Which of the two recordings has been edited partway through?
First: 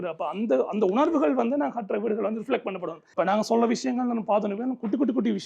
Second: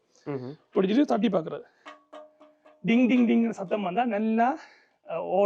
first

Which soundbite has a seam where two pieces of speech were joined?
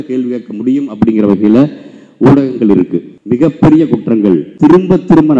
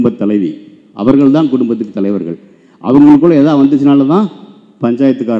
first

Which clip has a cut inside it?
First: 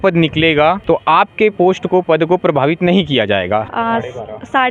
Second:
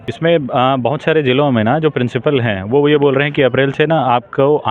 first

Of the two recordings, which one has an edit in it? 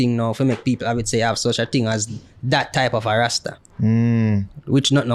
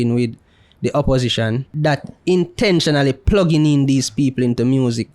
second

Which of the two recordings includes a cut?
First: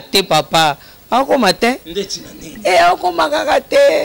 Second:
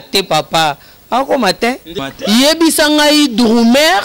second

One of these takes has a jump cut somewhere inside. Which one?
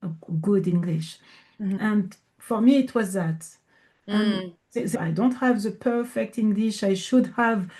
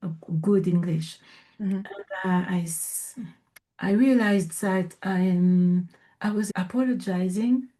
first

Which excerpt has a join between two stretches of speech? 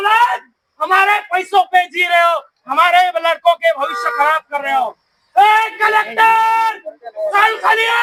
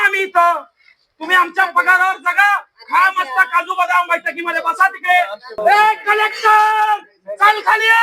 second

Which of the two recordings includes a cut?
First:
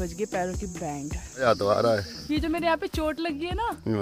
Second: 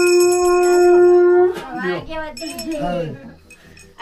first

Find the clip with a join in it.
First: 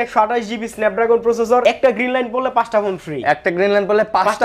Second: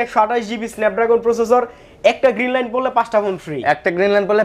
first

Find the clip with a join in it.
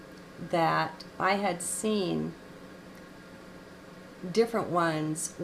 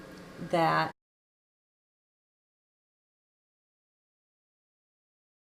first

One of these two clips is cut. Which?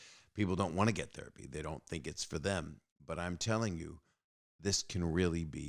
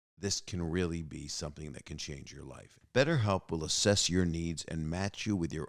second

